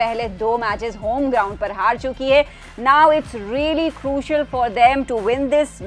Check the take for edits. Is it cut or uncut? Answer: uncut